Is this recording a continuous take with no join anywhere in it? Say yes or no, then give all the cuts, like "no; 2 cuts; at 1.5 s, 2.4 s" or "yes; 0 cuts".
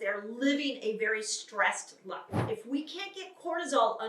no; 1 cut; at 2.5 s